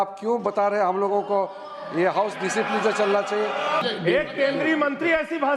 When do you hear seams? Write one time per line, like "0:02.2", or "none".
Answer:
0:03.8